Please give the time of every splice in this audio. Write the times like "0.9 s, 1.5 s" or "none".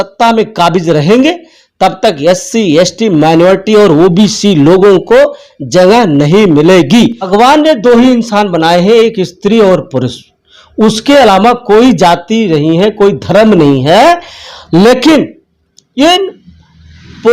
7.3 s